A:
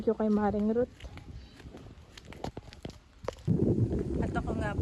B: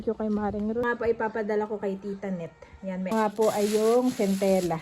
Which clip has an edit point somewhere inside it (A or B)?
B